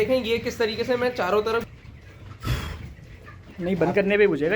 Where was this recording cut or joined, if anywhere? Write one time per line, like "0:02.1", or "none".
0:01.7